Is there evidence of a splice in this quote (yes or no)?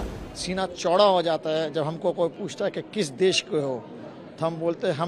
no